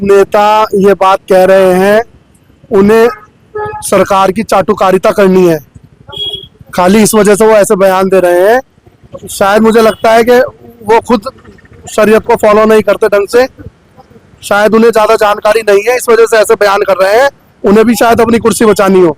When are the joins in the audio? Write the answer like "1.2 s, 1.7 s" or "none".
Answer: none